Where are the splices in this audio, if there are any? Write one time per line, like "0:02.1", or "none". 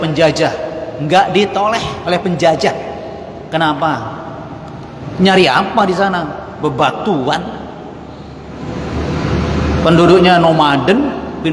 none